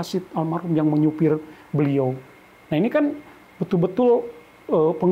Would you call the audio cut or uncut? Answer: uncut